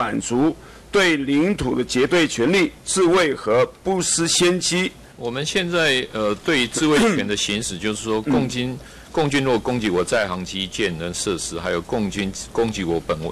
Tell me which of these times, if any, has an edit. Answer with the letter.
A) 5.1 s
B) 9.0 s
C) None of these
A